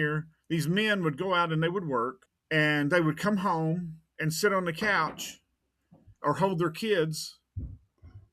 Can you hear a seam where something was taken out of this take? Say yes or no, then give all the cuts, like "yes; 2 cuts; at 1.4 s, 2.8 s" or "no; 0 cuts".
yes; 1 cut; at 2.2 s